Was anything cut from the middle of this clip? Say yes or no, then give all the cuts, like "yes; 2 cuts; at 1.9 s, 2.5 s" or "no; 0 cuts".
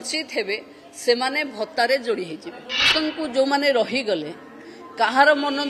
yes; 1 cut; at 2.9 s